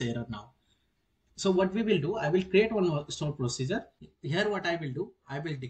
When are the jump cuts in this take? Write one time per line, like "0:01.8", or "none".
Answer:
0:04.0

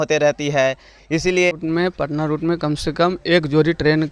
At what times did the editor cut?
0:01.5

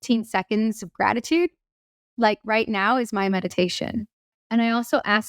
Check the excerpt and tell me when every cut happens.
0:04.4

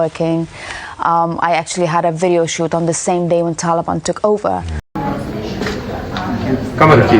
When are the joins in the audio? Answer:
0:04.9

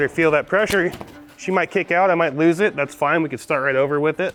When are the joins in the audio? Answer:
none

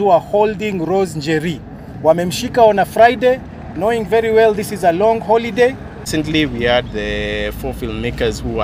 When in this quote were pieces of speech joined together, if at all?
0:06.1

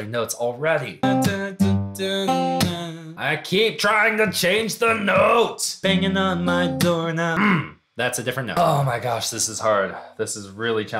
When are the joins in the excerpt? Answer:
0:01.0
0:05.7
0:08.5

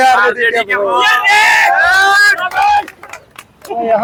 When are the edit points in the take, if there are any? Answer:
none

